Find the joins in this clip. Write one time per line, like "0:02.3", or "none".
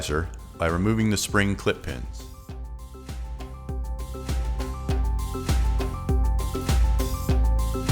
0:02.1